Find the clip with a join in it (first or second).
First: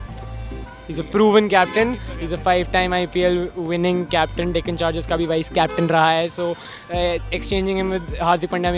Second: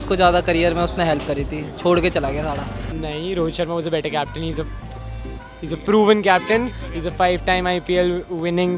second